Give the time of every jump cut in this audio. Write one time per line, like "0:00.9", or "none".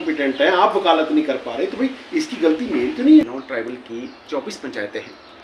0:03.2